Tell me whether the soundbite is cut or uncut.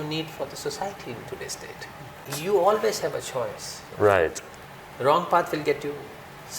cut